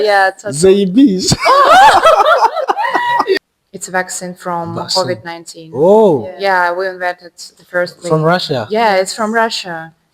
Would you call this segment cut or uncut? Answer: cut